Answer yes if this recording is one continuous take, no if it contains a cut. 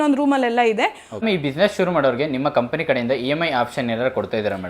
no